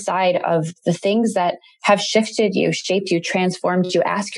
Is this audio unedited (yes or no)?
yes